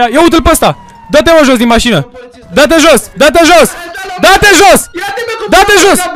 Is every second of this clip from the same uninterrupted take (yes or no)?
yes